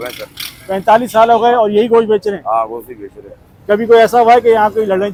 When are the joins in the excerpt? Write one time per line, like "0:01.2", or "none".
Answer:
none